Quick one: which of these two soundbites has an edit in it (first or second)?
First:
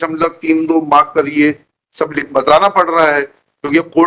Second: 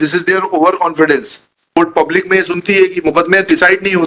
second